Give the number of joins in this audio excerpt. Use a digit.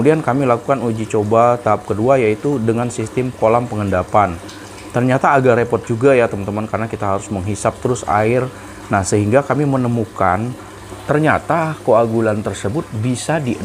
1